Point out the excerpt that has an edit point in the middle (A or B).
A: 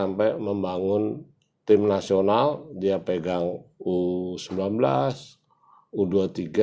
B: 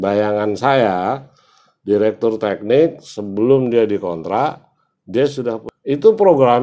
B